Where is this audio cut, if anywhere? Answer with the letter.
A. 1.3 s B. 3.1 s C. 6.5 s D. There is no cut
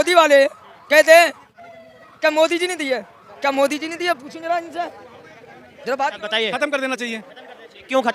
C